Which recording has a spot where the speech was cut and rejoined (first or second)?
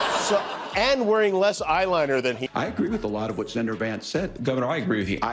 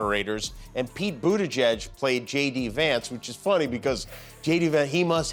first